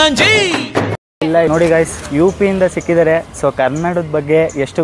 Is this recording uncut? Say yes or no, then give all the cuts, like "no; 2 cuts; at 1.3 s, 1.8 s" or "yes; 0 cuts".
no; 1 cut; at 1.5 s